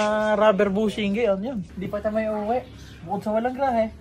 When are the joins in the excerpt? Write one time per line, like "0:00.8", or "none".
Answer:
0:01.7